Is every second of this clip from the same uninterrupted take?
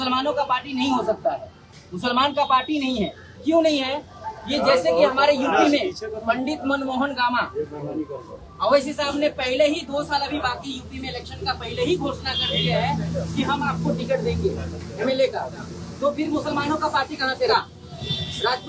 no; 1 cut; at 17.5 s

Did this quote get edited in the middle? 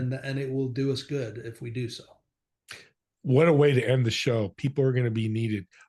no; 0 cuts

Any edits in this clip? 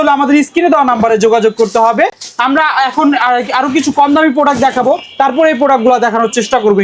no; 0 cuts

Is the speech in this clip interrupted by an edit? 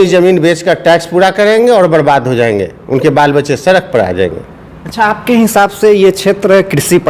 no; 0 cuts

